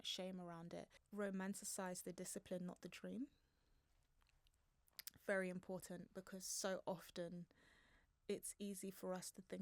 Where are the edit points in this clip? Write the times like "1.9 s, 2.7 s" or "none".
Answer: 1.0 s